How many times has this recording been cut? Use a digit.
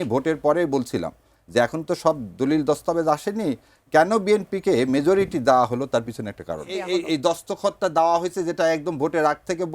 1